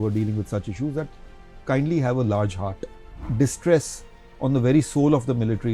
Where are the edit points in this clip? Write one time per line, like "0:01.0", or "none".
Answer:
0:03.2

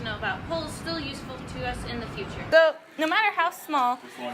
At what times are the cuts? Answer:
0:02.5

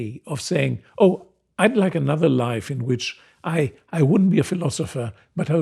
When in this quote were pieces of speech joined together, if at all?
none

